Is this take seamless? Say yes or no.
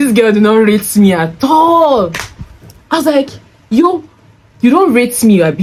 yes